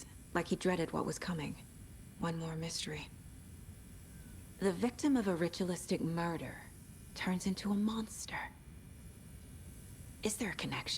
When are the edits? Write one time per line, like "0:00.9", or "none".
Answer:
0:03.1
0:04.6
0:08.5
0:10.2